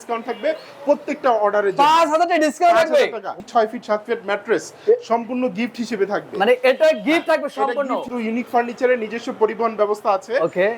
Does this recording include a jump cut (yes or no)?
yes